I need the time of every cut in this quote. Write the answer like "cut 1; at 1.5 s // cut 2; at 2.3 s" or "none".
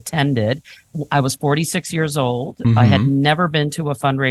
none